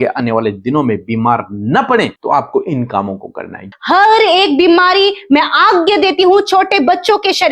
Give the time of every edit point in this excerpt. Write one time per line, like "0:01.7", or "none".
0:02.2
0:03.7

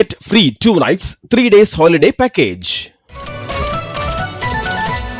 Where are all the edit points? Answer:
none

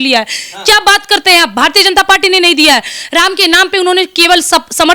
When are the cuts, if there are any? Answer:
none

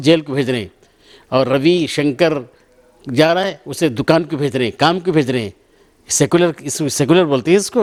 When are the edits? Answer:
none

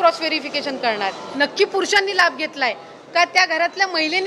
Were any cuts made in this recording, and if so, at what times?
0:01.2

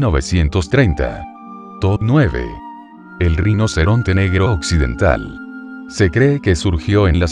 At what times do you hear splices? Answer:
0:01.8

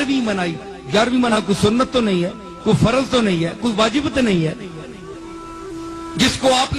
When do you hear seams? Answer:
0:01.4

